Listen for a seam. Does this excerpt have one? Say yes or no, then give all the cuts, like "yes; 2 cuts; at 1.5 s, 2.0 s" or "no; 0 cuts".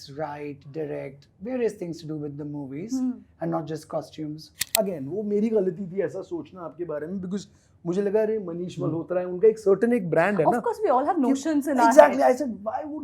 yes; 1 cut; at 4.6 s